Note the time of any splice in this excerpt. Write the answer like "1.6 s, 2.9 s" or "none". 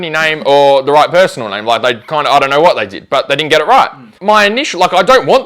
4.1 s